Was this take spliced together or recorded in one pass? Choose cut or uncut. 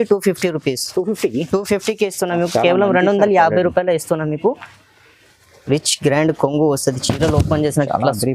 cut